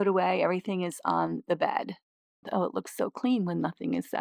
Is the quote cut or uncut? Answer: cut